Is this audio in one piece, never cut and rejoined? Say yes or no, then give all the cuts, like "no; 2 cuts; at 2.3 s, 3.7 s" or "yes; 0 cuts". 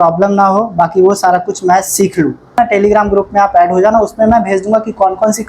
no; 1 cut; at 2.6 s